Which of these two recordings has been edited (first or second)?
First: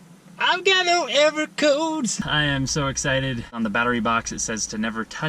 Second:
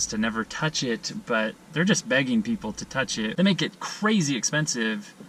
first